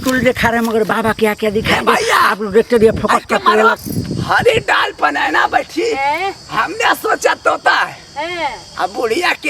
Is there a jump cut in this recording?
yes; 1 cut; at 3.8 s

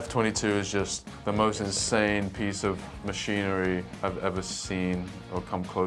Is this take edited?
yes; 1 cut; at 1.1 s

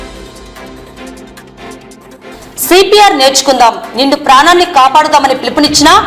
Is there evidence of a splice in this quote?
yes; 1 cut; at 1.6 s

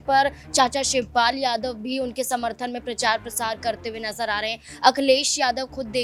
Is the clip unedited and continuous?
yes; 0 cuts

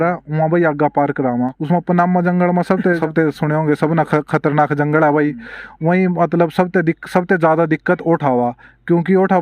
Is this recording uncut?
no; 2 cuts; at 1.6 s, 3.0 s

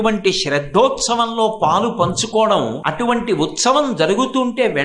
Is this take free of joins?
no; 1 cut; at 2.8 s

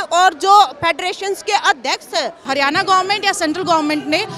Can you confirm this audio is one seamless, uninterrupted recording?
no; 1 cut; at 2.4 s

